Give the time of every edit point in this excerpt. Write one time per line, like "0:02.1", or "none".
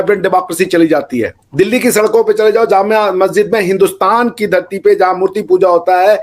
0:01.4